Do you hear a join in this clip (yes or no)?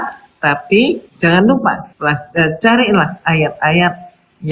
yes